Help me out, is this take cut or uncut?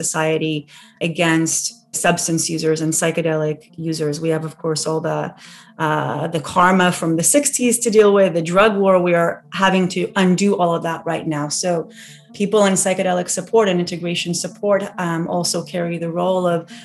cut